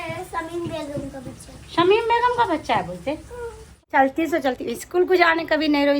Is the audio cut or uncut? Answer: cut